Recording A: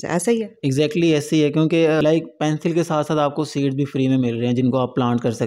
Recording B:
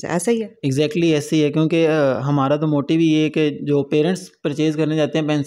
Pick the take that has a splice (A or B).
A